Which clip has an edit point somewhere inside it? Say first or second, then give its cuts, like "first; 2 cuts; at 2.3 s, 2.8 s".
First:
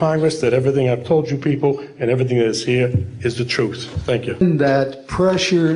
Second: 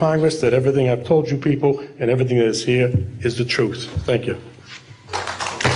first; 1 cut; at 4.4 s